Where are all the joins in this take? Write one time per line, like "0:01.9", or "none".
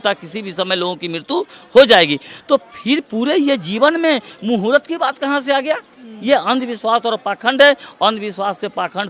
none